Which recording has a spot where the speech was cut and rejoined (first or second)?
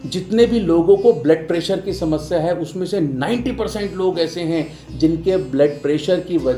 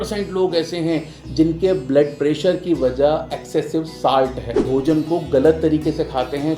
second